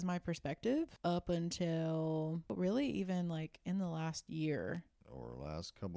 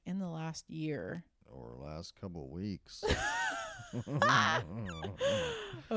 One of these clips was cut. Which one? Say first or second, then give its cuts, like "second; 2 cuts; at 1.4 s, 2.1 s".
first; 2 cuts; at 0.9 s, 2.5 s